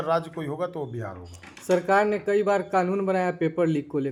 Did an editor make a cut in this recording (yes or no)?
no